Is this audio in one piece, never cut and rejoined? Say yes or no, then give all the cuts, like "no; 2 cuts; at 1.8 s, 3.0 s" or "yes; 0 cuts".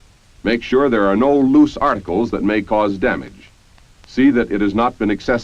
no; 1 cut; at 4.0 s